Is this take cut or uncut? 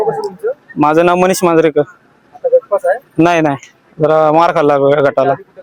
uncut